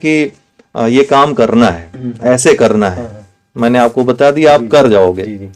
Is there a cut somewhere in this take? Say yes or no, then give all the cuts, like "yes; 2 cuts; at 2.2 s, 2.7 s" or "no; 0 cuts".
no; 0 cuts